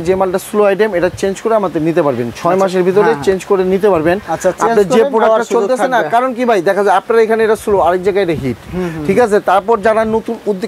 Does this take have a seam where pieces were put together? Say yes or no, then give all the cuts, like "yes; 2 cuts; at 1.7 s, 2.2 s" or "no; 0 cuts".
no; 0 cuts